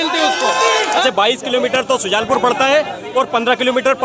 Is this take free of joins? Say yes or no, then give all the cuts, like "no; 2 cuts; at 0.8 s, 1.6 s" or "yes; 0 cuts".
no; 1 cut; at 1.0 s